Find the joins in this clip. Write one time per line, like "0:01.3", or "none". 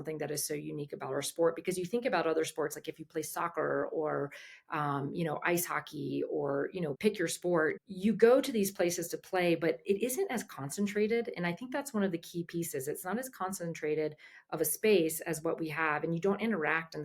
0:07.0
0:07.8